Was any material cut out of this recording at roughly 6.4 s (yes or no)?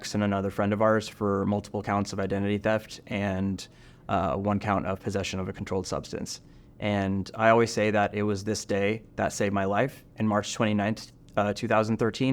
no